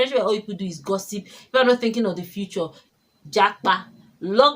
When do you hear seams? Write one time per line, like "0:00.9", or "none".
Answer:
0:02.8

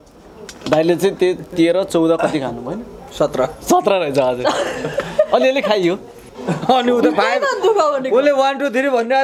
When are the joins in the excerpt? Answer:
0:06.3

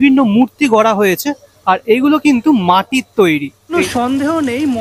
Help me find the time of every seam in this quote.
0:03.7

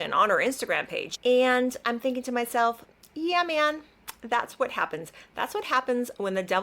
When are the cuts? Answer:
0:01.2

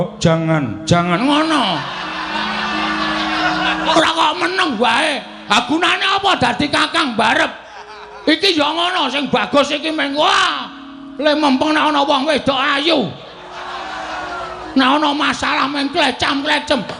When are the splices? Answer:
none

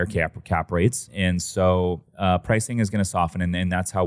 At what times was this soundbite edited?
0:01.1
0:02.1

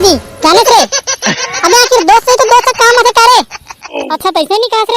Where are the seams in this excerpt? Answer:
0:04.0

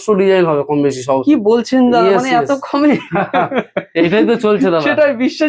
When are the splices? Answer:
none

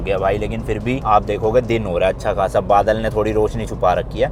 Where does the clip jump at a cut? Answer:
none

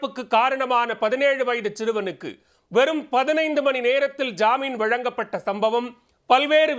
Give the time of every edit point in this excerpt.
none

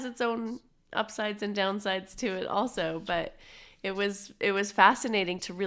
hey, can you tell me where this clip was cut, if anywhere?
none

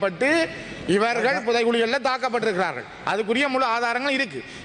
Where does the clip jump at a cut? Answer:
none

